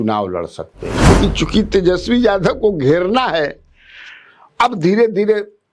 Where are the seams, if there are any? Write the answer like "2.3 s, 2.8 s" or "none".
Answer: 1.1 s